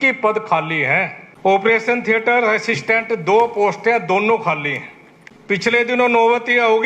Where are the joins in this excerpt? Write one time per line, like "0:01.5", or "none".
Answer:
0:01.2
0:05.6